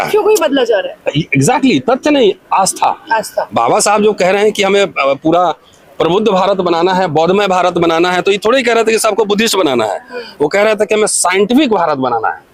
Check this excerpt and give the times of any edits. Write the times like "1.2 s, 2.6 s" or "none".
none